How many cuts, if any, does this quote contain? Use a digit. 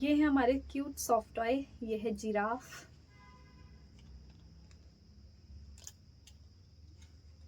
0